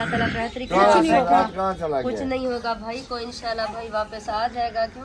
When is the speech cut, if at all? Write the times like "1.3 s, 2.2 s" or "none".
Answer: none